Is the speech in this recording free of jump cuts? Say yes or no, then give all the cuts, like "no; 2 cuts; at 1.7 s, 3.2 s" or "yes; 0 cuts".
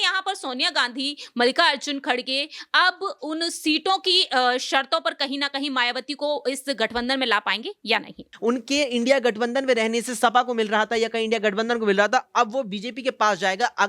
no; 1 cut; at 8.3 s